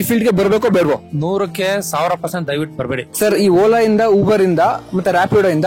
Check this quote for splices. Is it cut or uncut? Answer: cut